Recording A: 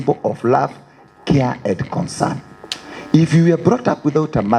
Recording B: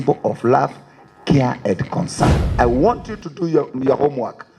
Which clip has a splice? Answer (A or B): B